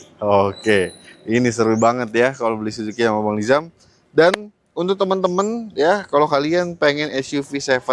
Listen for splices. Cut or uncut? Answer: uncut